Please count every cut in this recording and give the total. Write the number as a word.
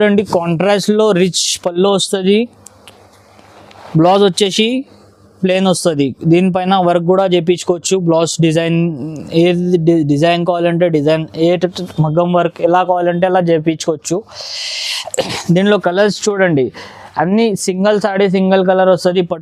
zero